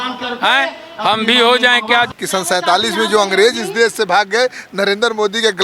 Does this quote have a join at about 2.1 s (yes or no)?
yes